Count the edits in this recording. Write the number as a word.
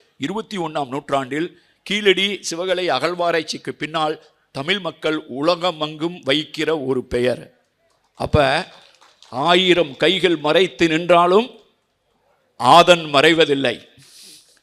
zero